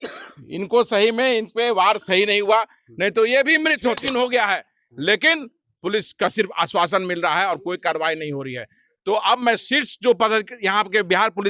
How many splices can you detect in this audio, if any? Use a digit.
1